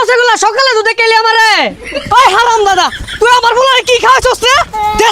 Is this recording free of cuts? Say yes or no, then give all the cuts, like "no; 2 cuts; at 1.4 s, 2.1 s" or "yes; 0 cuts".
no; 1 cut; at 1.8 s